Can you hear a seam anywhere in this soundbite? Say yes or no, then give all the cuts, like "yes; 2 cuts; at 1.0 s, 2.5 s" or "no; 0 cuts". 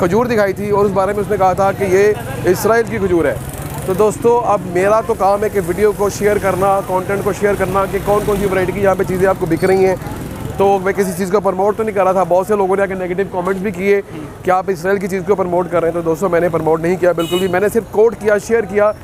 no; 0 cuts